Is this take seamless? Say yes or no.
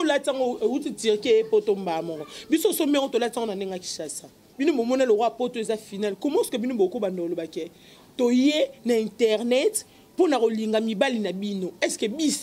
no